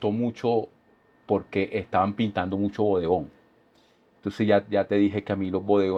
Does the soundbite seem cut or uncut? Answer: uncut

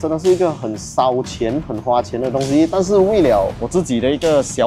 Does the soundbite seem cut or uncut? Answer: uncut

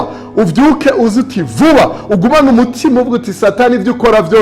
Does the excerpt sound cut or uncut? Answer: uncut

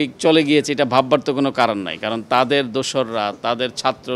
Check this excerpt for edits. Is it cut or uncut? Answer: uncut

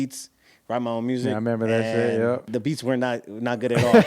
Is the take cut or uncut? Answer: cut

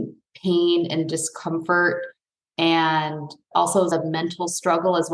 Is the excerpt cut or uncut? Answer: cut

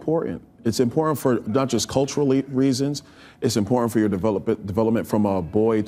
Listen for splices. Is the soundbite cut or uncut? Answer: uncut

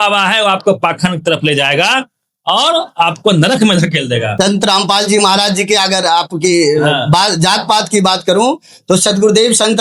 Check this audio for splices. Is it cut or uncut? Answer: cut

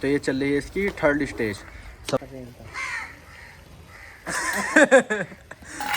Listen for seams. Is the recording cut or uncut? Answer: cut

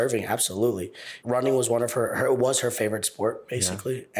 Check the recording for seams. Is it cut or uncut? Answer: cut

